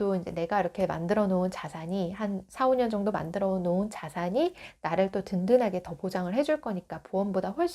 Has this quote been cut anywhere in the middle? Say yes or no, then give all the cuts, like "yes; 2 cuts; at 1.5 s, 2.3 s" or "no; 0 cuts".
no; 0 cuts